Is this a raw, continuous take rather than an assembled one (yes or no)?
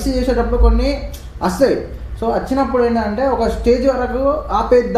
yes